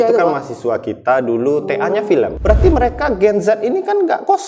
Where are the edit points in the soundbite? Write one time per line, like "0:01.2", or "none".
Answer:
0:02.4